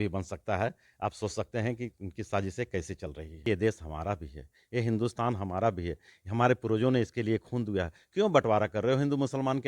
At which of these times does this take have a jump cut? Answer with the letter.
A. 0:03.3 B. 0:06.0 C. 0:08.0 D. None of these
A